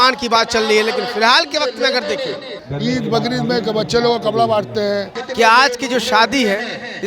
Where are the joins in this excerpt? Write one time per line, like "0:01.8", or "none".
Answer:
0:02.6
0:05.2